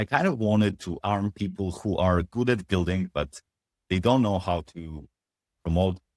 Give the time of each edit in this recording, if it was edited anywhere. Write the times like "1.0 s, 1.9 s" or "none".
1.0 s